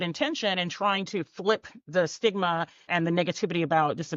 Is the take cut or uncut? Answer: cut